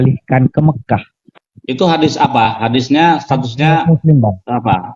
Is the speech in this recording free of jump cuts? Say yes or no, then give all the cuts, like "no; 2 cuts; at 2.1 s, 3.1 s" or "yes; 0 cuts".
yes; 0 cuts